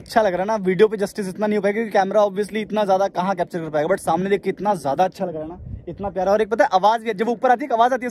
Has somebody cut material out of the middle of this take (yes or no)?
no